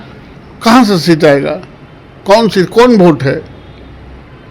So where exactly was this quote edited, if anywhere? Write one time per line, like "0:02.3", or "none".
none